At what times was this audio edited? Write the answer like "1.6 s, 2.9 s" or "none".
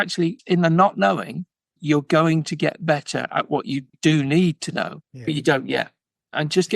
5.0 s